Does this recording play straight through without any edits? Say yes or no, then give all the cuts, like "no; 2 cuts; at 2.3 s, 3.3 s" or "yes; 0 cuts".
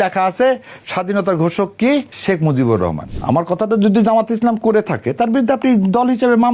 no; 2 cuts; at 2.1 s, 3.1 s